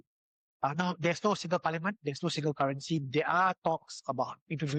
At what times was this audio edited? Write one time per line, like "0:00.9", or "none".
none